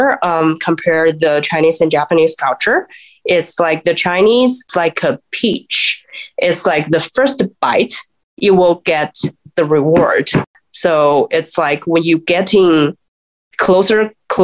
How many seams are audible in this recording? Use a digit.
2